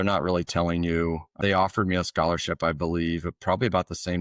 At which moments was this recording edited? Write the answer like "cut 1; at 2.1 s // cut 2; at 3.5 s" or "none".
cut 1; at 1.3 s